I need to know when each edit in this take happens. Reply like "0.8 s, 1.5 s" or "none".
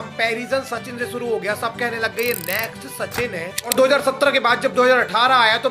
3.6 s